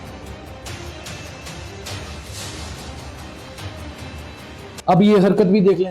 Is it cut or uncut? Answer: cut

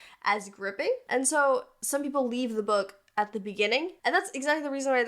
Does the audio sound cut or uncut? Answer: cut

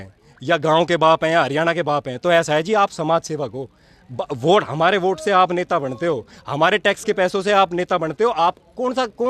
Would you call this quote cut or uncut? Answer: uncut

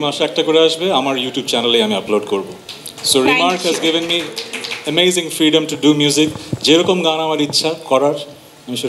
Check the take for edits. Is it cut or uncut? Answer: uncut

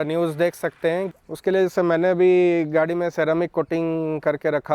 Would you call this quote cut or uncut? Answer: cut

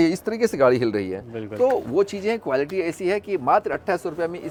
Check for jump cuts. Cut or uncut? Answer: uncut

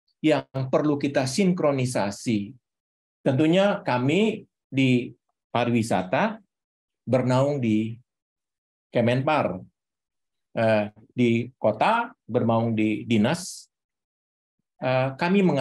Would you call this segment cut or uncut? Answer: uncut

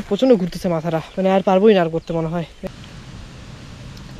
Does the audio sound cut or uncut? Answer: cut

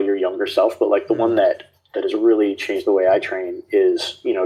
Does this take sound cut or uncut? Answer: uncut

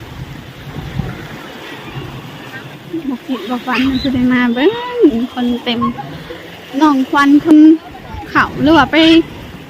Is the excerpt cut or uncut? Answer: cut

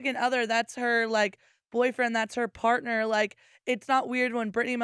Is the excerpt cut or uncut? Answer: uncut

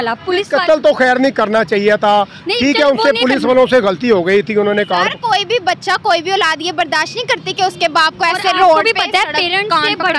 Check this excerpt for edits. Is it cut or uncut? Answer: uncut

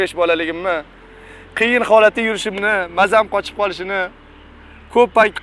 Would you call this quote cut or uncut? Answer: uncut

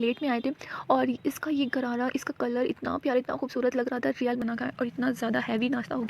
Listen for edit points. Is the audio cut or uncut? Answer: cut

